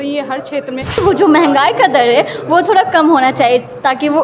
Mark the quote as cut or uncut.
cut